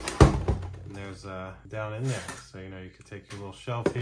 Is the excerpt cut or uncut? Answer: cut